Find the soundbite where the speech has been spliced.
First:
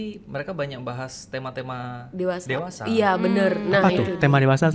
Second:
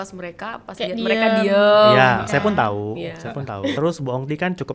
second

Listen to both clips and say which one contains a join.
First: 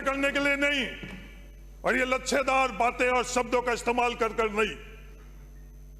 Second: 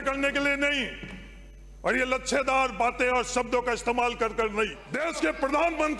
second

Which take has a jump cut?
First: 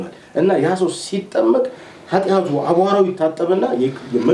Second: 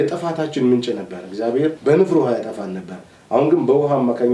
second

